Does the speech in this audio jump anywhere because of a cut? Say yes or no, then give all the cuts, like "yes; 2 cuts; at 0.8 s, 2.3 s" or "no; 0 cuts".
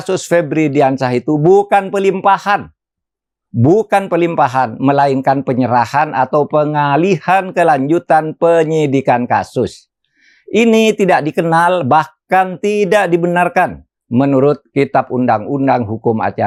no; 0 cuts